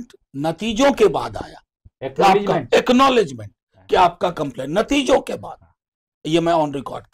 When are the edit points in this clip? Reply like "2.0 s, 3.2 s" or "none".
none